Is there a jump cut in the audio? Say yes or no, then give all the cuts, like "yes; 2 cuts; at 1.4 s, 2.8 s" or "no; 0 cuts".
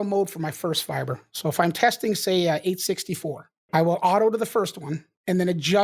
yes; 1 cut; at 3.6 s